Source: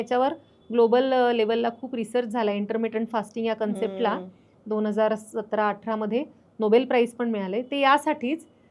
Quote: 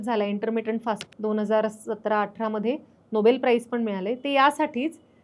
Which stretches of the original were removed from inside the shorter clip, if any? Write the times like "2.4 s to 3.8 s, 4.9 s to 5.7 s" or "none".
3.3 s to 4.5 s